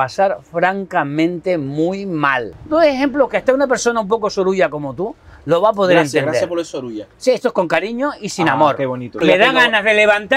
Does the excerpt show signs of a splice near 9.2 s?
yes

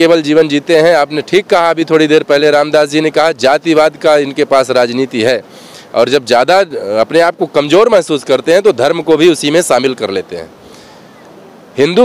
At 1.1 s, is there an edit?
no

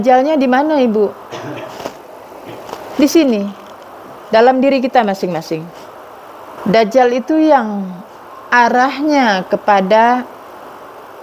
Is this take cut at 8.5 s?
no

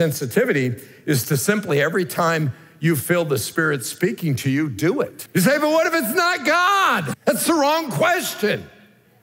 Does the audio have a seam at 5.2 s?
yes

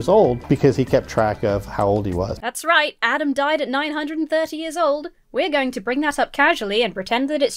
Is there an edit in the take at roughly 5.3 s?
no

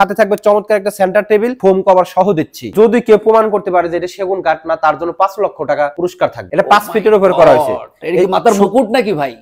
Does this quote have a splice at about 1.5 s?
yes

